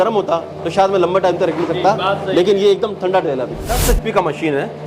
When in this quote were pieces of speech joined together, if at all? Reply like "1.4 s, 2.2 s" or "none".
3.8 s